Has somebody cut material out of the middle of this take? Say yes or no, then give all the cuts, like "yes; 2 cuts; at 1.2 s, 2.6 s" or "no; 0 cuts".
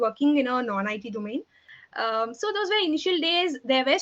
yes; 1 cut; at 1.6 s